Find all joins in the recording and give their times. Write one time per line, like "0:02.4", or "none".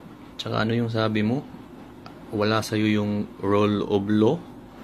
none